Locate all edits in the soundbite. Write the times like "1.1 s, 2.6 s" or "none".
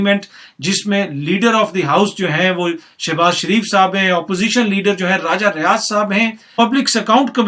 6.5 s